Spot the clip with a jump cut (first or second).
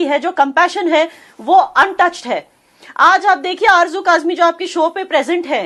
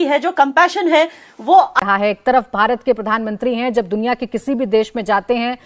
second